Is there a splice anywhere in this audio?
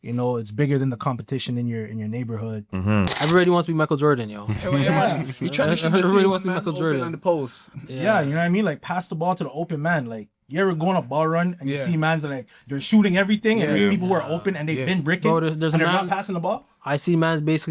yes; 1 cut; at 3.1 s

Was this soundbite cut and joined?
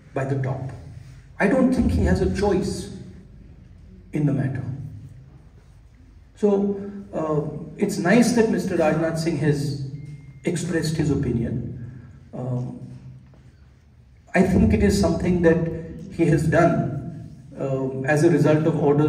no; 0 cuts

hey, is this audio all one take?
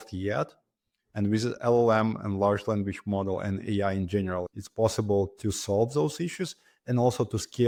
yes; 0 cuts

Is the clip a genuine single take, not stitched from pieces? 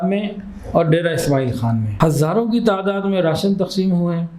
no; 1 cut; at 1.9 s

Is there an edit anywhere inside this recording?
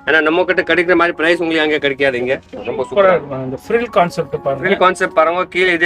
yes; 1 cut; at 2.6 s

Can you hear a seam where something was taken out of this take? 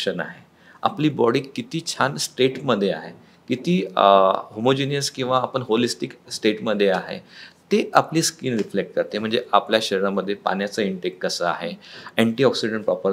no; 0 cuts

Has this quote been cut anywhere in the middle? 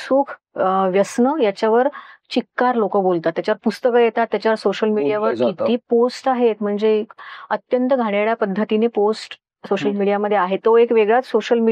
no; 0 cuts

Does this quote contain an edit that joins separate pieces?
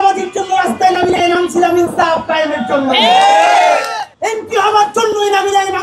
yes; 1 cut; at 4.0 s

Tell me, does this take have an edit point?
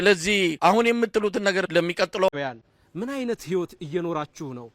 yes; 1 cut; at 2.3 s

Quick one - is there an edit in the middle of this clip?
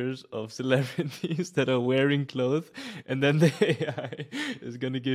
no; 0 cuts

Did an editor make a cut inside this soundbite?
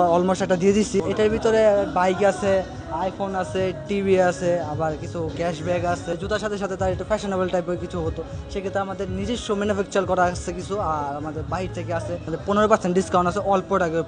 yes; 3 cuts; at 1.0 s, 6.1 s, 12.3 s

